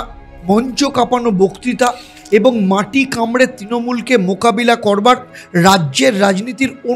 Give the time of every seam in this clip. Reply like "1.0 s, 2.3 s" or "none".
none